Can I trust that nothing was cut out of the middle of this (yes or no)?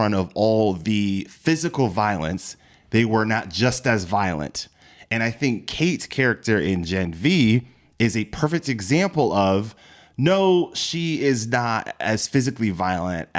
yes